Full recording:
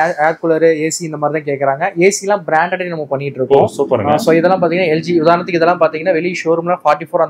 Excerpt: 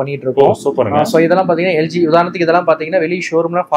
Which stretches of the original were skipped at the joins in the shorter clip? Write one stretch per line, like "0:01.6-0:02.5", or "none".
none